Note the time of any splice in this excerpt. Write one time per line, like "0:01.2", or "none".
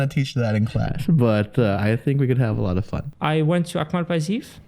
0:03.0